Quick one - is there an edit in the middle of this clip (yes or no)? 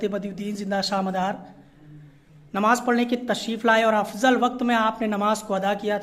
no